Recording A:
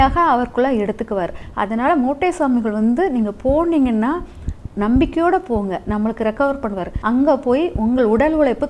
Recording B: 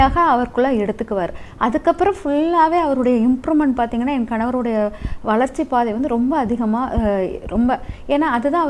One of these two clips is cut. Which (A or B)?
A